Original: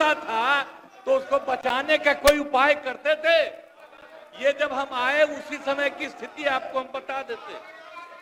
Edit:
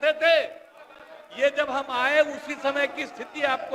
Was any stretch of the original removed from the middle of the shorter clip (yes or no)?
no